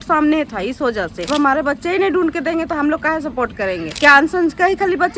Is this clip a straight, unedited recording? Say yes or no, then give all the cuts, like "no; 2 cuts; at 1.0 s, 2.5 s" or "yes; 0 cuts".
no; 2 cuts; at 1.2 s, 3.9 s